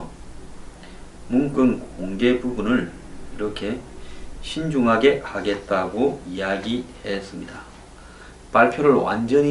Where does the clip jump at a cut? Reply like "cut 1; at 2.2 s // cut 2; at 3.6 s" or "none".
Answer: none